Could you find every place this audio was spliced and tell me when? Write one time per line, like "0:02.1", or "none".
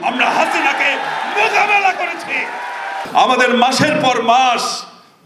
0:03.0